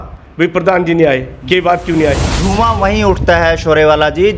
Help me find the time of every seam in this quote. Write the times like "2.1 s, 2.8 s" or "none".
2.3 s